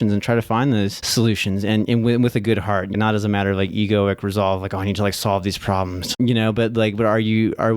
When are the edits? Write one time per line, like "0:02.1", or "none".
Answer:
0:01.0
0:03.0
0:06.2